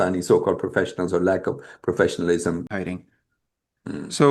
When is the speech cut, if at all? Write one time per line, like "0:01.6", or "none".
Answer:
0:02.7